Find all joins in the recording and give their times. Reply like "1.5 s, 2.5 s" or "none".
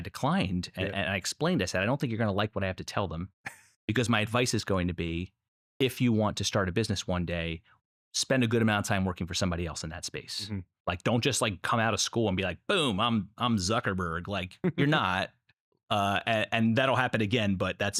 none